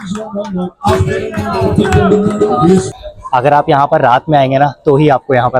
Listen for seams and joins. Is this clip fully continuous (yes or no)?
no